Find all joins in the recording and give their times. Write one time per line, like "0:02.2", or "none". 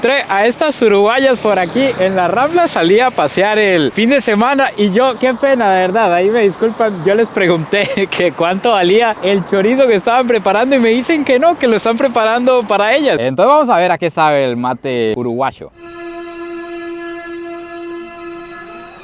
0:13.2